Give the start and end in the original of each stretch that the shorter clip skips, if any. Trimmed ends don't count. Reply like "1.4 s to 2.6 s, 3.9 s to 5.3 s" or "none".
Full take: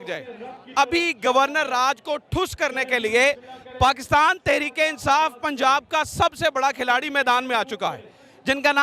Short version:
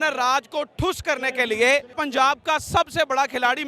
3.5 s to 5.4 s